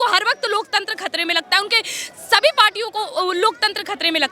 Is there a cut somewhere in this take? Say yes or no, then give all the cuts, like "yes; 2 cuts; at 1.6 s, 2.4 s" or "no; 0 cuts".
no; 0 cuts